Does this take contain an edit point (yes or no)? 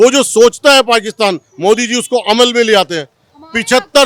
no